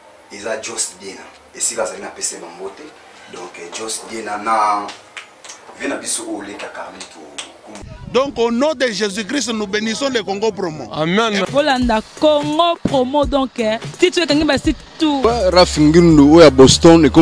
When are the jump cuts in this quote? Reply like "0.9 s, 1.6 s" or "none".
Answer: 7.8 s, 15.2 s